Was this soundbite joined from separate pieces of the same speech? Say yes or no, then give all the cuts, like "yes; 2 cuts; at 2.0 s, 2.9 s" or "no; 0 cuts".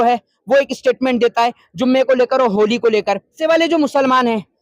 yes; 1 cut; at 3.4 s